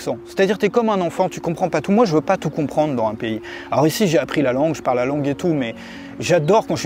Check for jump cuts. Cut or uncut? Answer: uncut